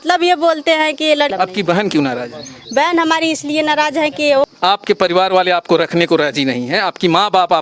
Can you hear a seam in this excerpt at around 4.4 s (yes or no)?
yes